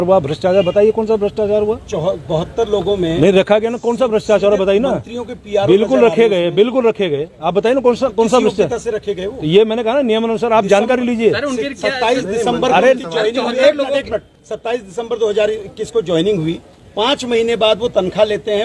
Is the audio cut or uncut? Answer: uncut